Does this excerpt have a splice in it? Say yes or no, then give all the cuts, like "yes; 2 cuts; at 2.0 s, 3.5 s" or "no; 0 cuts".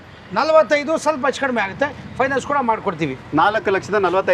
no; 0 cuts